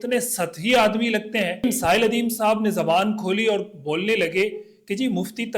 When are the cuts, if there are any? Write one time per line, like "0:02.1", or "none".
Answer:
0:01.6

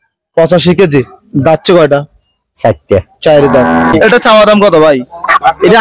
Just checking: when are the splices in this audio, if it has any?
0:03.9

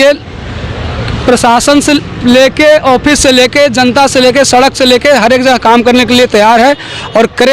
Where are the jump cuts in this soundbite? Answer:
none

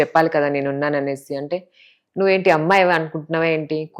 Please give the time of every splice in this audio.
none

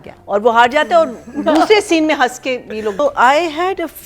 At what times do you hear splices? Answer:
0:03.0

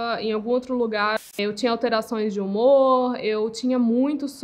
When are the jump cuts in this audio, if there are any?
0:01.4

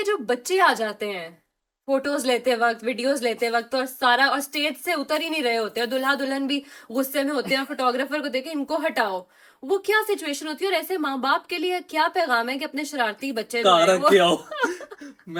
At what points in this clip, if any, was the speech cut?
none

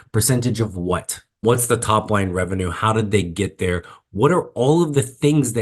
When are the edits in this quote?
0:01.4

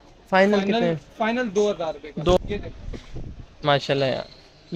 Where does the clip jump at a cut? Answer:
0:02.4

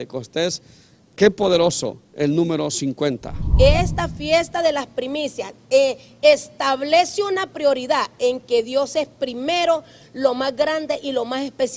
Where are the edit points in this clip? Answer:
0:03.4

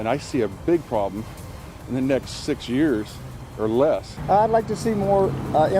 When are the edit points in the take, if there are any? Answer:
0:04.1

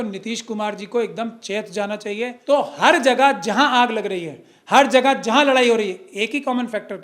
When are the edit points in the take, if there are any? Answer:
0:02.4

